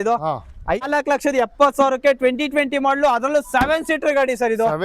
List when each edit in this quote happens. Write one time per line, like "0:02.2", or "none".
0:00.9